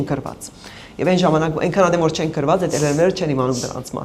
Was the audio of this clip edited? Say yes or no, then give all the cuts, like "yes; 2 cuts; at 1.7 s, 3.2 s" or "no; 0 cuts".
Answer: no; 0 cuts